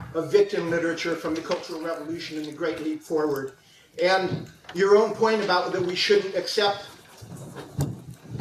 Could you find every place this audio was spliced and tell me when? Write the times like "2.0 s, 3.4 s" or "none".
none